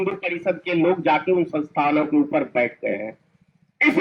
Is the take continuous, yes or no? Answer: yes